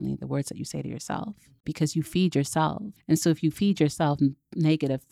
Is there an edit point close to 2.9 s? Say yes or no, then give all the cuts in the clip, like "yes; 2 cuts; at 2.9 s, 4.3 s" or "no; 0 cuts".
yes; 2 cuts; at 1.6 s, 2.9 s